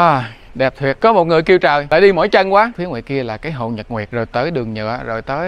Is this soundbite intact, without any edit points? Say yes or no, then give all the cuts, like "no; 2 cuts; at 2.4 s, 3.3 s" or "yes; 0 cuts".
no; 4 cuts; at 1.0 s, 1.8 s, 2.8 s, 4.1 s